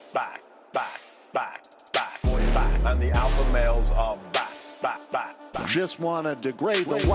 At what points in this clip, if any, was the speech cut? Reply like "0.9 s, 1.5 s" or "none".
none